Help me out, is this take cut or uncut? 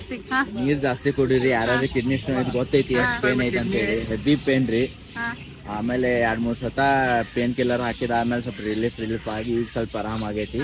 uncut